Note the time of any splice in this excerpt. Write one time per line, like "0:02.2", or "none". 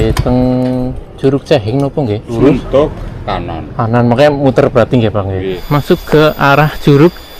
0:02.3
0:05.6